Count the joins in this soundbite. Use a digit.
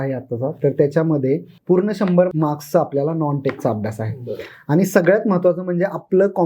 2